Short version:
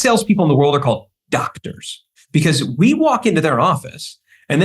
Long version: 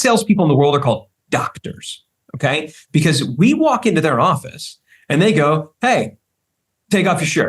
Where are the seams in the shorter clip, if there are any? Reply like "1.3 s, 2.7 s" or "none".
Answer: 2.2 s